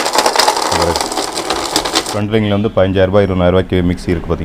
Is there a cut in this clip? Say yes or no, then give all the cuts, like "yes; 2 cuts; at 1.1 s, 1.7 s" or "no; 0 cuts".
yes; 1 cut; at 2.1 s